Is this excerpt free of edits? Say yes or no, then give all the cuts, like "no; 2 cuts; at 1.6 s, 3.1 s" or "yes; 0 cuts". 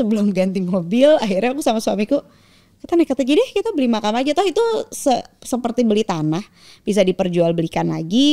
yes; 0 cuts